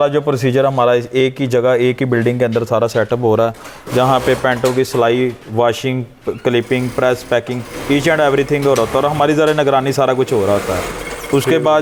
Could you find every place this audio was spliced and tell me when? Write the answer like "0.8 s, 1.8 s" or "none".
none